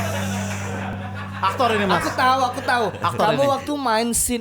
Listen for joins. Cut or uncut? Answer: uncut